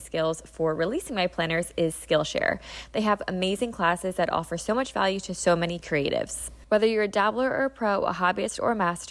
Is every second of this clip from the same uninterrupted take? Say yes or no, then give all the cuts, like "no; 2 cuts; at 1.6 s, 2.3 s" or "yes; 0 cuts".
no; 1 cut; at 6.5 s